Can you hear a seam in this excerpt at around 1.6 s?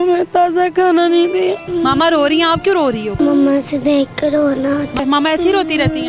yes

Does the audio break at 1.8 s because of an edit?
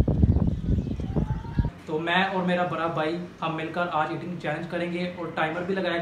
yes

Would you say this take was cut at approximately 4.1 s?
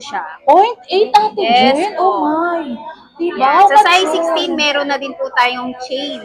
no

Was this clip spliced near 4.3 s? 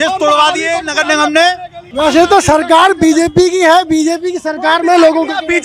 no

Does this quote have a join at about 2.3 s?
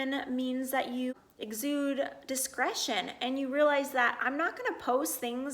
no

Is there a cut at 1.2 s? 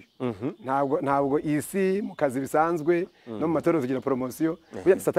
no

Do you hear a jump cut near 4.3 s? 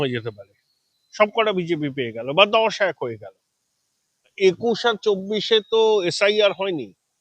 yes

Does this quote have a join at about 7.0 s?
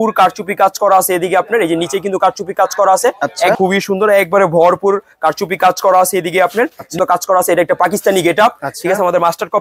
yes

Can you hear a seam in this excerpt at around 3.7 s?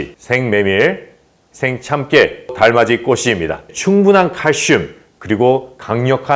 yes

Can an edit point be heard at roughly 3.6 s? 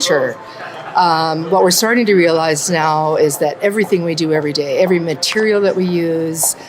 no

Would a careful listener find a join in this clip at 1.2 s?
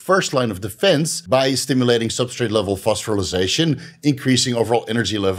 yes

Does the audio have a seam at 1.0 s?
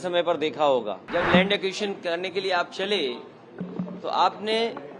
yes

